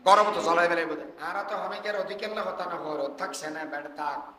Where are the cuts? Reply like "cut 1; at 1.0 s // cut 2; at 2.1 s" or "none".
cut 1; at 1.1 s